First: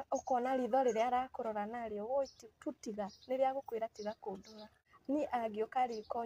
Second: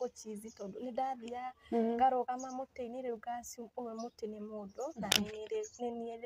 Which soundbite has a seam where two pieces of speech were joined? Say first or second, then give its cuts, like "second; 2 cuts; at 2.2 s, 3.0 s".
first; 1 cut; at 5.1 s